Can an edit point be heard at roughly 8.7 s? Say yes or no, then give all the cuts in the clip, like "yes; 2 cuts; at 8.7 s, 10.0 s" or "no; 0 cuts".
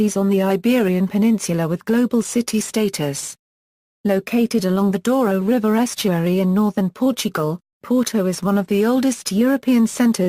no; 0 cuts